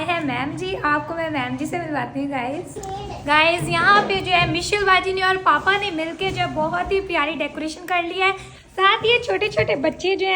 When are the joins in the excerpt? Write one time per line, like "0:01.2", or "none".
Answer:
0:02.8